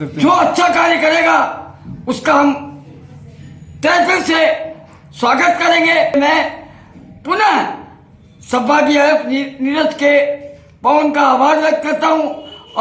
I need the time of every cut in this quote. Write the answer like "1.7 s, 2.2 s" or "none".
6.1 s

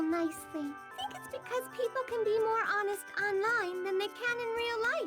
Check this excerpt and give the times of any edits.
0.9 s

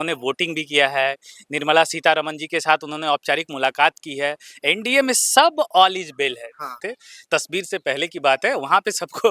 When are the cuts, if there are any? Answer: 6.8 s

